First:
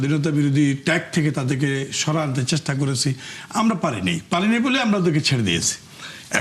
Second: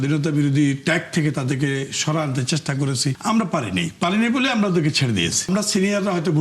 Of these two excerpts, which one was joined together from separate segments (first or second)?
second